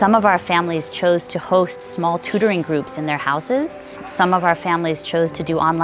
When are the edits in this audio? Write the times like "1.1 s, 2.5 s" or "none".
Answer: 4.0 s

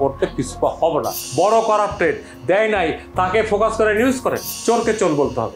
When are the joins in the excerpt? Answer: 1.2 s, 4.5 s

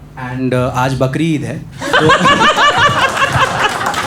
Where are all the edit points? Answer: none

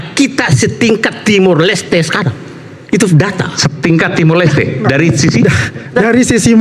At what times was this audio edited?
none

